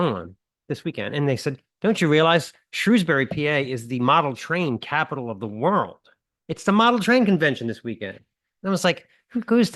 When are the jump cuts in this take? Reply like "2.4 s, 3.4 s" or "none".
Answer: none